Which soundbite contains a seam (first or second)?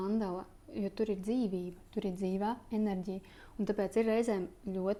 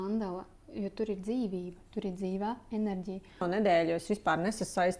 second